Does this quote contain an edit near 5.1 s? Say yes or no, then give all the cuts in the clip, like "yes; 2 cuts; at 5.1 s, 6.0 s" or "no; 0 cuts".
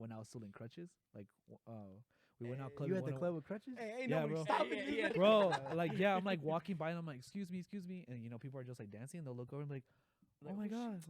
yes; 1 cut; at 5.1 s